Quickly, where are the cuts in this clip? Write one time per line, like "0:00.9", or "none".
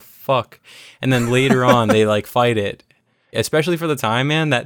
0:03.3